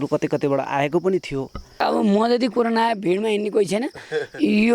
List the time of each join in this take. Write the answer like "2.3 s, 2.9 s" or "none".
1.8 s